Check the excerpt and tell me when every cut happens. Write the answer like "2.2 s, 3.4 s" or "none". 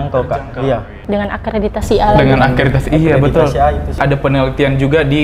0.9 s, 4.0 s